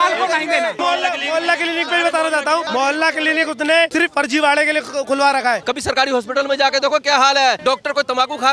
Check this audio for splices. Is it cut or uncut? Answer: cut